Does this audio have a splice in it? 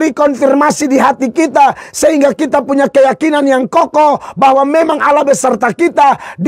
no; 0 cuts

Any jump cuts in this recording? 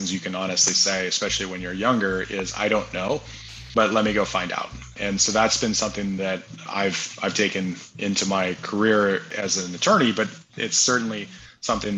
yes; 3 cuts; at 4.9 s, 6.6 s, 9.3 s

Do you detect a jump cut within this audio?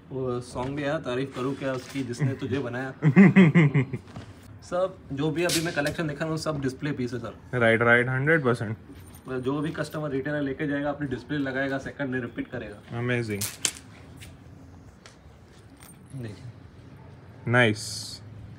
yes; 1 cut; at 4.6 s

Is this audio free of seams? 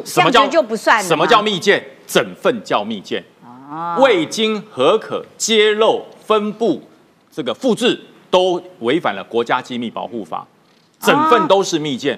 yes; 0 cuts

